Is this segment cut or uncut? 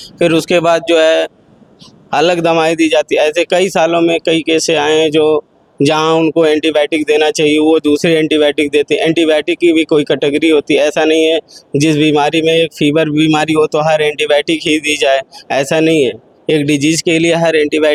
uncut